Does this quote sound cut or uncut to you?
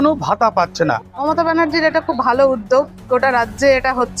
cut